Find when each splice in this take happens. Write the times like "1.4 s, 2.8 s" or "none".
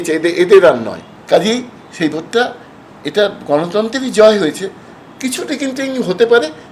1.1 s